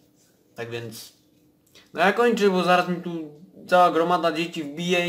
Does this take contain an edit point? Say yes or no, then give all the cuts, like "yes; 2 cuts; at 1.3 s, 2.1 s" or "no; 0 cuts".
no; 0 cuts